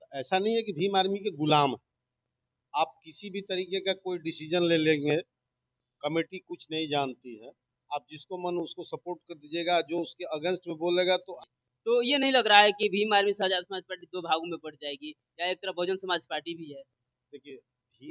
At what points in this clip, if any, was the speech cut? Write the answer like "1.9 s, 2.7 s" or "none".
11.3 s